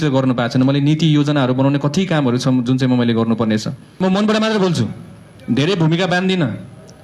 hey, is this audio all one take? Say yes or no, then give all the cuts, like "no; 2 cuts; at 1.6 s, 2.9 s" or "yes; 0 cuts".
no; 1 cut; at 4.0 s